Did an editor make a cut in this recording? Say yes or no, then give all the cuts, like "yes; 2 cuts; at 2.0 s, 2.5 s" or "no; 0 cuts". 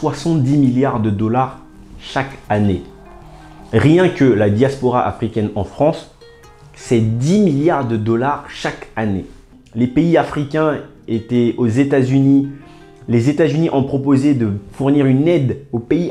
yes; 1 cut; at 9.6 s